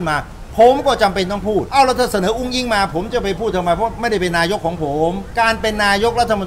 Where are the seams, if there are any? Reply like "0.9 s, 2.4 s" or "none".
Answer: 1.7 s, 5.2 s